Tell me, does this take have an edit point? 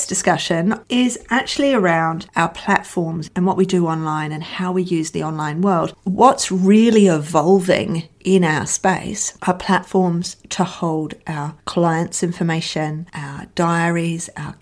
yes; 3 cuts; at 0.8 s, 3.2 s, 5.9 s

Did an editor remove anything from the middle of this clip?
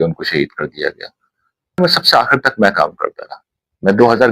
yes; 1 cut; at 1.8 s

